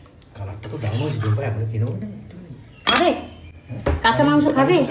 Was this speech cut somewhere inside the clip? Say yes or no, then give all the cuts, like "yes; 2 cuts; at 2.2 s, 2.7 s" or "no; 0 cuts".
no; 0 cuts